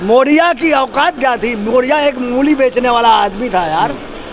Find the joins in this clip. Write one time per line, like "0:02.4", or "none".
none